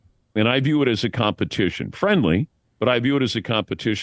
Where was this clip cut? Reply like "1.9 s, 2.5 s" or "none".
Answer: none